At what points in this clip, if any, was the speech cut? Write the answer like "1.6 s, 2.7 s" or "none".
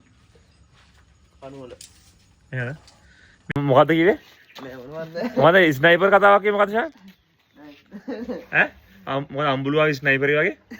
3.4 s